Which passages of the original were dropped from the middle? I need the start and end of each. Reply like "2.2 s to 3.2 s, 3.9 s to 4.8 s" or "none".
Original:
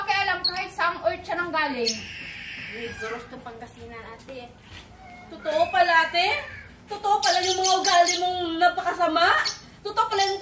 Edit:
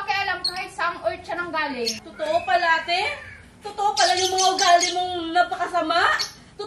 2.0 s to 5.3 s